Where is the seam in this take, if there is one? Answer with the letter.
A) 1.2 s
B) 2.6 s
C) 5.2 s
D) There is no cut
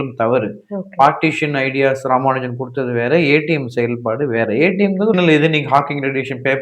C